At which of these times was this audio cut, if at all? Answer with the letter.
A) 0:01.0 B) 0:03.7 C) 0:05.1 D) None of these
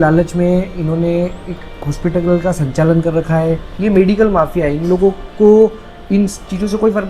B